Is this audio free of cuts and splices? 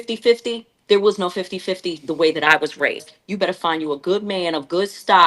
no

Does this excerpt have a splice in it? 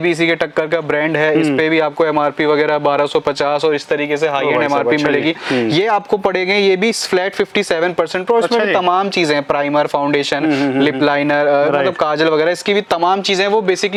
no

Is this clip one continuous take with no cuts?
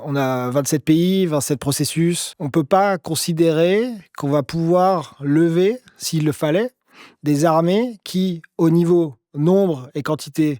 no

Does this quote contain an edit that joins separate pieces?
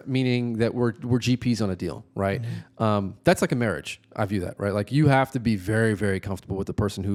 no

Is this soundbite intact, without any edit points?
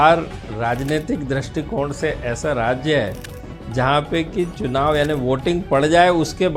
yes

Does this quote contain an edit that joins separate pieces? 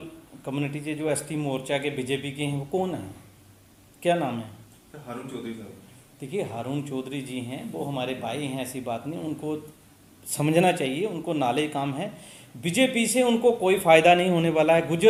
no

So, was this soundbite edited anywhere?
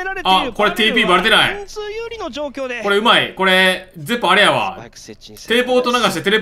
no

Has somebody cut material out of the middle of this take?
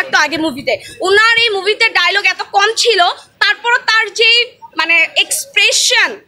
no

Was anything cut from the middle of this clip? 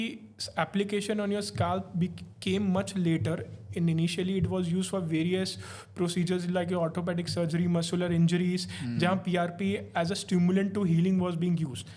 no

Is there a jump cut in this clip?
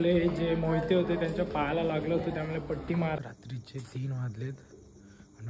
yes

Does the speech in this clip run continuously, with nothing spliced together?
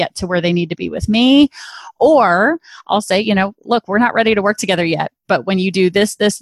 yes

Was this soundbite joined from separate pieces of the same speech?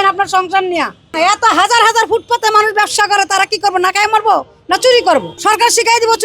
yes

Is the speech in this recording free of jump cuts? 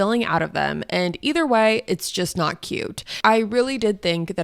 no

